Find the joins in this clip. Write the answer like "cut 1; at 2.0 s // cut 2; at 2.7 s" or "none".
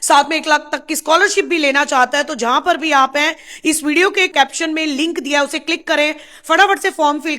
none